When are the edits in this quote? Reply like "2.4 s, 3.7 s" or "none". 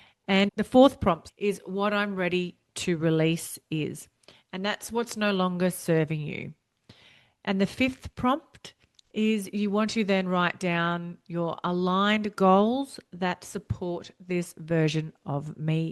none